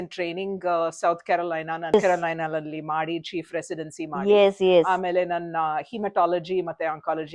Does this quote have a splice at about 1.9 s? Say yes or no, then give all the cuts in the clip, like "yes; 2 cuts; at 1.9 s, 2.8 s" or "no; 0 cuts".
yes; 1 cut; at 1.9 s